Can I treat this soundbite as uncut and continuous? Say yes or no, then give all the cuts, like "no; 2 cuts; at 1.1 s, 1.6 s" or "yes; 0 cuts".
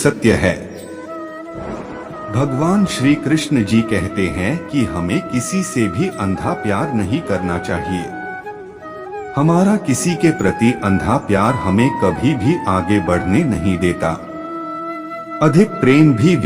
no; 2 cuts; at 0.9 s, 2.3 s